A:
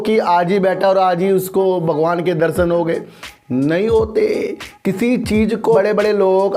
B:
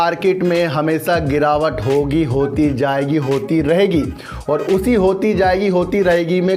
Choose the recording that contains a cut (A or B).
A